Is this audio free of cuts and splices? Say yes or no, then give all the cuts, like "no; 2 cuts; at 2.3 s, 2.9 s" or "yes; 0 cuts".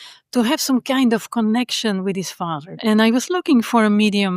no; 1 cut; at 2.8 s